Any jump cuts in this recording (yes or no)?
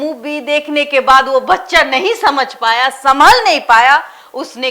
no